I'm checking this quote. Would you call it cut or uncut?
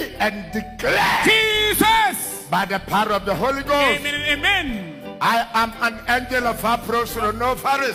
uncut